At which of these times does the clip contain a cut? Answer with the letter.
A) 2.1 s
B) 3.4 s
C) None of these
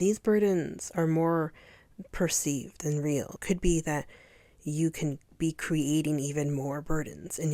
B